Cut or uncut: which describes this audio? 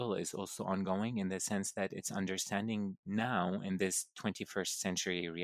uncut